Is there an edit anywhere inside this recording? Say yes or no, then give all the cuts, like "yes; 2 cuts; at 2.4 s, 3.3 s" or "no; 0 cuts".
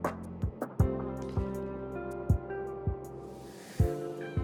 no; 0 cuts